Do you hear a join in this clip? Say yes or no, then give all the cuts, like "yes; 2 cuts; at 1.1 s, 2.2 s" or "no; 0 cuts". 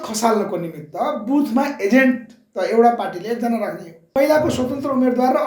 yes; 1 cut; at 4.1 s